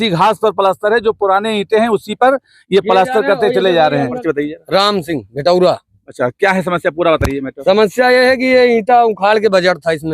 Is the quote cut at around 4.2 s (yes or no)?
yes